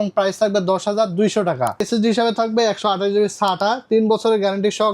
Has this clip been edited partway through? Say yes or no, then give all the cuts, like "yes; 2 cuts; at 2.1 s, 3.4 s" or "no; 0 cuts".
yes; 1 cut; at 1.9 s